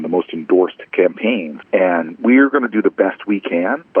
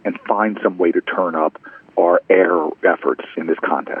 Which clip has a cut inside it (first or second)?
first